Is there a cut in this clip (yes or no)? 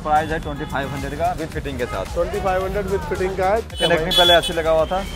yes